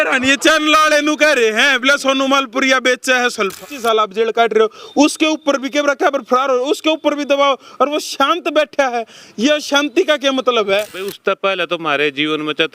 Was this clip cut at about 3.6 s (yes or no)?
yes